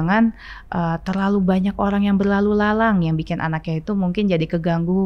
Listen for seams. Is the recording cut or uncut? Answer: uncut